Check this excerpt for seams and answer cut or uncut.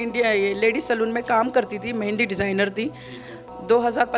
uncut